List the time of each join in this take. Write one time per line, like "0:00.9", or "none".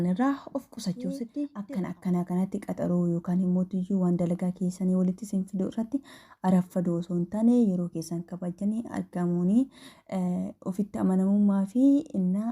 0:01.6